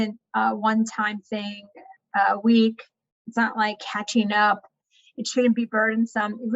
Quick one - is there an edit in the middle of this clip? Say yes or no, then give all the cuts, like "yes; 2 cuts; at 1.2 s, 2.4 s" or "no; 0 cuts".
no; 0 cuts